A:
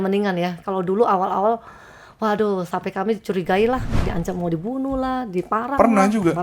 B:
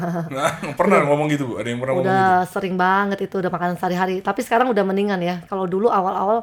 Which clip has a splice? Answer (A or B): A